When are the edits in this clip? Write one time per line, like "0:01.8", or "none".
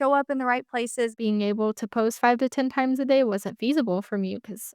0:01.2